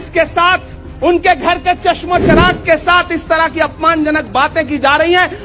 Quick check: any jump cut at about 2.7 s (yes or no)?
no